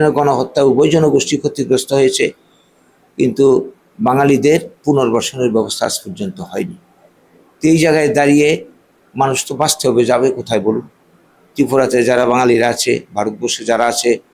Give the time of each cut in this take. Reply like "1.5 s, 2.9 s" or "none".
none